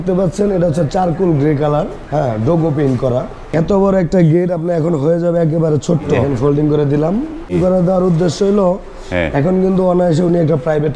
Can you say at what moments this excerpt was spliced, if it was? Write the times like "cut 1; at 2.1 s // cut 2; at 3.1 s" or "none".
cut 1; at 2.0 s // cut 2; at 3.5 s // cut 3; at 6.2 s // cut 4; at 7.5 s